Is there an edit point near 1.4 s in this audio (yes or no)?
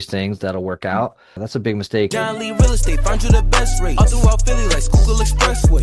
yes